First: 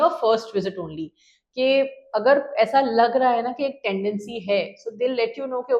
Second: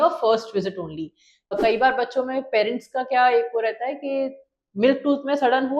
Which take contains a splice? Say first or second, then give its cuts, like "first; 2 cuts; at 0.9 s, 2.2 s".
second; 1 cut; at 1.6 s